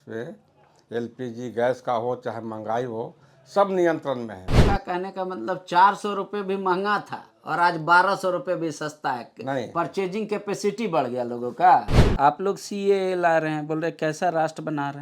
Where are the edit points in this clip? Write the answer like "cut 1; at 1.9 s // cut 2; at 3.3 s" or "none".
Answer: cut 1; at 4.6 s // cut 2; at 12.0 s